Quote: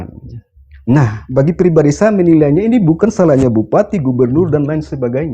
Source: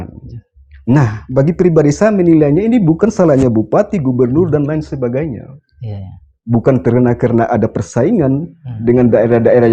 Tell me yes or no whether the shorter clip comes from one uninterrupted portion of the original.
yes